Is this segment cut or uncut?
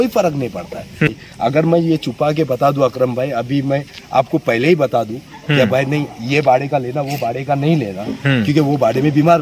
cut